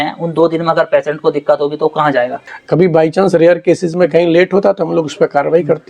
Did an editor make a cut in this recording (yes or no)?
yes